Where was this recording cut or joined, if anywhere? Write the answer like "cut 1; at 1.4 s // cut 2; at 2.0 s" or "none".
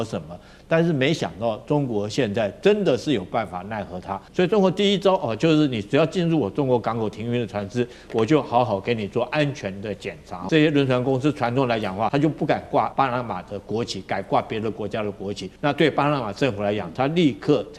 cut 1; at 4.2 s // cut 2; at 10.4 s // cut 3; at 12.1 s // cut 4; at 12.9 s // cut 5; at 15.5 s